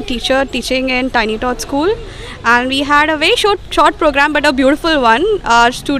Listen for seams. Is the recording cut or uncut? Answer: uncut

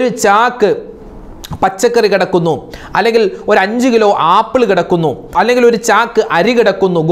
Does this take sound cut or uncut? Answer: uncut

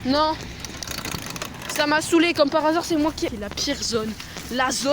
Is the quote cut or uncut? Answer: cut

